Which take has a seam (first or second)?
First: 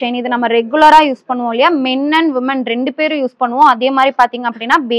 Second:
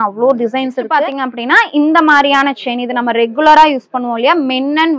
second